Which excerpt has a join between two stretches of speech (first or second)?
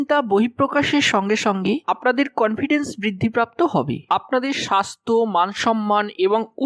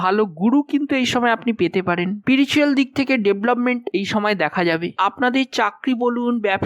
second